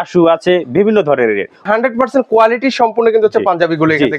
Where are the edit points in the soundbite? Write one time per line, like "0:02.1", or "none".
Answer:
0:01.6